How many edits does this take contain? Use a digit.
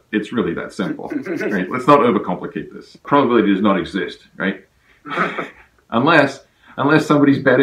1